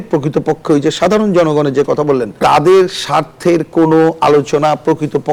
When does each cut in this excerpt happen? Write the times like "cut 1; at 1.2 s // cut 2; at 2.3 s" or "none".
none